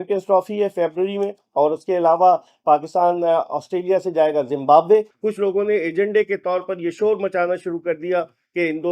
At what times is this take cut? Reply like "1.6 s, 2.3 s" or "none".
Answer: 5.2 s